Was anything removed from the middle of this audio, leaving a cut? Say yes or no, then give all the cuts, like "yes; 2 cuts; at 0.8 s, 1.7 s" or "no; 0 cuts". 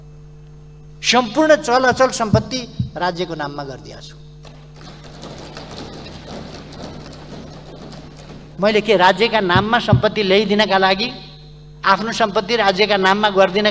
no; 0 cuts